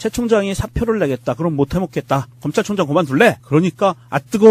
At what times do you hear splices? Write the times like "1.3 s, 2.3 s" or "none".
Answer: 3.1 s